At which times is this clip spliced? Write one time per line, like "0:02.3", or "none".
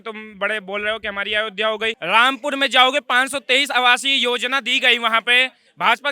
0:02.0